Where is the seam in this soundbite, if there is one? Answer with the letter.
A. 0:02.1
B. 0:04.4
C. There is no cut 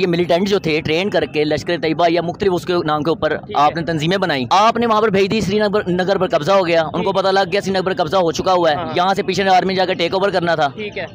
B